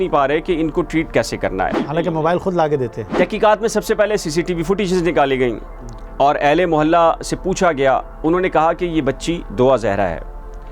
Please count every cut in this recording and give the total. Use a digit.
2